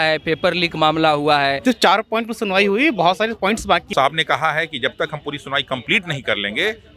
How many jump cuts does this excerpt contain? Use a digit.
2